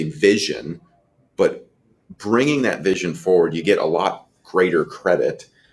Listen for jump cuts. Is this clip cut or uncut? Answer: uncut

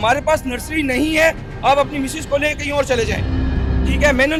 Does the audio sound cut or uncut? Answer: uncut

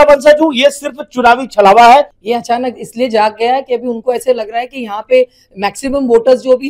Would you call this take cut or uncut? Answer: cut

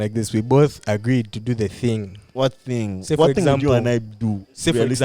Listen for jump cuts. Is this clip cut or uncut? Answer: cut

